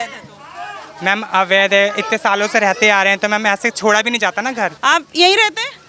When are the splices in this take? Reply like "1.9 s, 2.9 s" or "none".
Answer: 4.8 s